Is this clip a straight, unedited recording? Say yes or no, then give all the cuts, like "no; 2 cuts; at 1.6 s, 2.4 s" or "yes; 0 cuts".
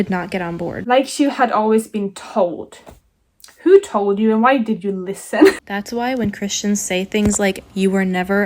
no; 1 cut; at 5.7 s